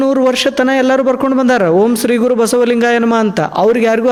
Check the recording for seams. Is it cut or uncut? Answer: uncut